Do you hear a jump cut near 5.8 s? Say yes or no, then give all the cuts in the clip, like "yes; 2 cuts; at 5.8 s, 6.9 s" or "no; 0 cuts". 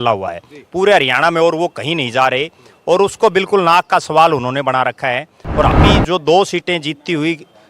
yes; 1 cut; at 5.8 s